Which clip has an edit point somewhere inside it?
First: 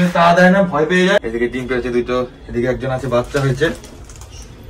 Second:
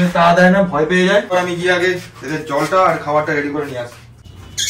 first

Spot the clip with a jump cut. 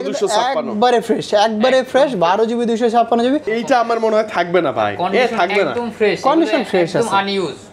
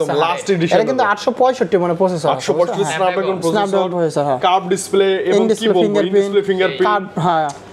first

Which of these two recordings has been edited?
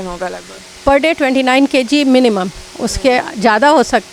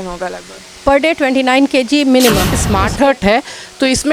second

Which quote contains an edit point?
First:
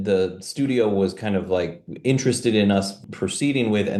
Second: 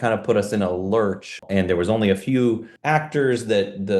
second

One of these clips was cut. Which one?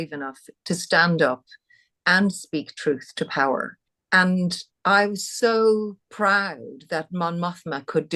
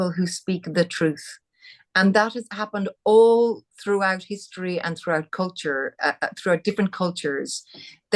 first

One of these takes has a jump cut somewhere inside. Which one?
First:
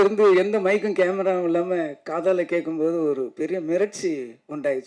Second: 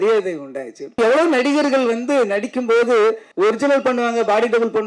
second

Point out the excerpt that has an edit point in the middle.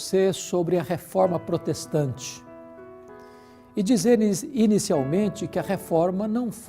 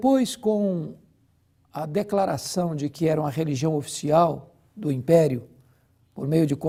first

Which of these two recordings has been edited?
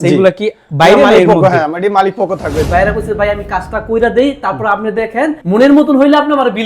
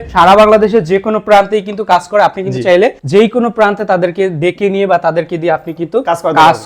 first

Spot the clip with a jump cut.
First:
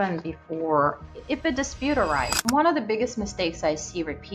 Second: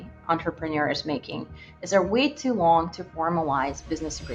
first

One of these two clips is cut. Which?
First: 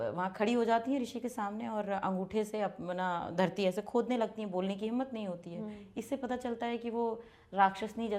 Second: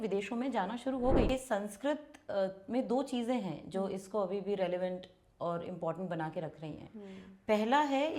second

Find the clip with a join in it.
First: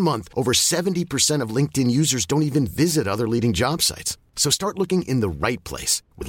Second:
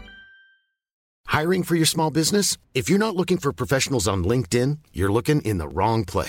second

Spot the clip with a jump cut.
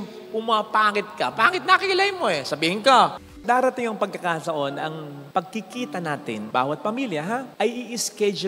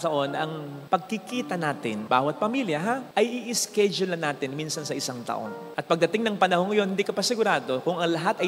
first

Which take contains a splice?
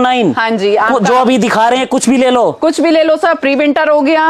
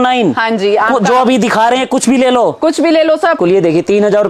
second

